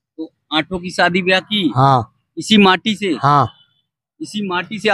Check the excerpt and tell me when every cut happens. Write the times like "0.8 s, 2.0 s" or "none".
none